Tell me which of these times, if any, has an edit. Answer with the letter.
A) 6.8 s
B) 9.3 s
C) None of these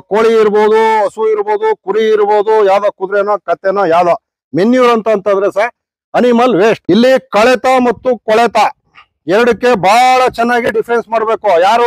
A